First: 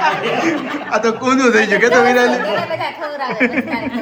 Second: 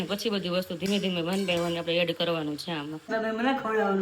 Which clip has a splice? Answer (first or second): second